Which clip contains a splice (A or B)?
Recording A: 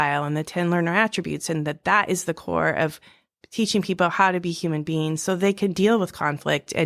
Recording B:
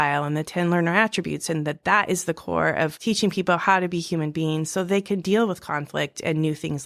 B